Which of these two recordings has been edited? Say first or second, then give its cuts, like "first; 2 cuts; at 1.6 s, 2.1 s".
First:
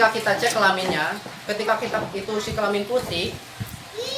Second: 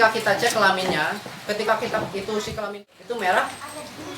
second; 1 cut; at 2.8 s